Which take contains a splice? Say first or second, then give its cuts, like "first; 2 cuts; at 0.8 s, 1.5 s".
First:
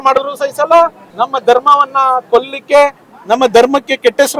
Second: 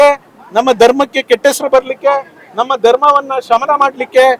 first; 1 cut; at 1.1 s